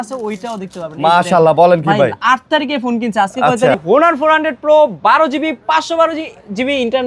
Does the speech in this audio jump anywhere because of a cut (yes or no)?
yes